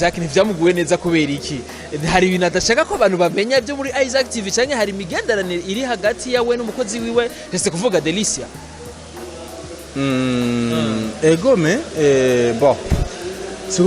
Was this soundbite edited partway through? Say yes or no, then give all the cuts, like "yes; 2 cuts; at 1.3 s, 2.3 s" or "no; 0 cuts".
no; 0 cuts